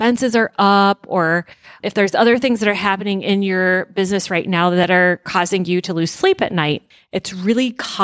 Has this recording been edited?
yes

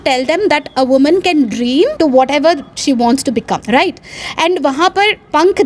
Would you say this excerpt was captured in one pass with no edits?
no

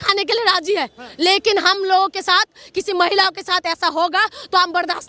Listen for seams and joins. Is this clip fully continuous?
yes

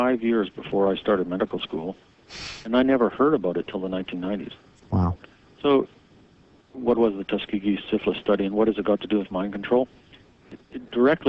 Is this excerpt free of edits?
no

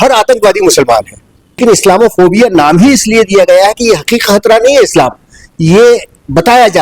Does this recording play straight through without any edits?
no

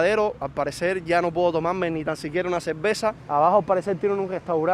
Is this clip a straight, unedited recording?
no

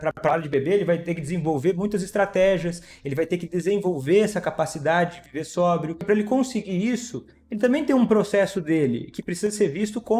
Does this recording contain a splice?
yes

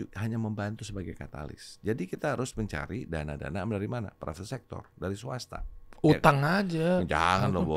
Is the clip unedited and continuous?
yes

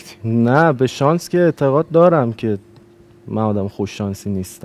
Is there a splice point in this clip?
no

